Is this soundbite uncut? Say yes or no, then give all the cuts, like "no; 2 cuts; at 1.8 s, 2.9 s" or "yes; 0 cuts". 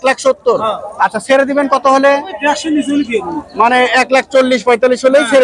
yes; 0 cuts